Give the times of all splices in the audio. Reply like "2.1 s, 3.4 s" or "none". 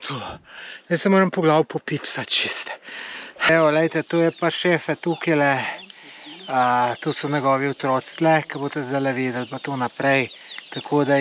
3.5 s